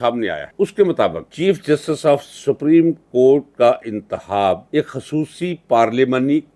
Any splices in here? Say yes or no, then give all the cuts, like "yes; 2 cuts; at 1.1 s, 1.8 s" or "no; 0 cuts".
no; 0 cuts